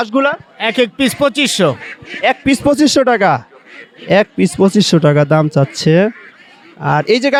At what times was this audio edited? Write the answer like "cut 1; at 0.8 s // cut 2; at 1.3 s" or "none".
none